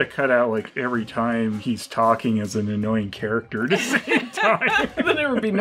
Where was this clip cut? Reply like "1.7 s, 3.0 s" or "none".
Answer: none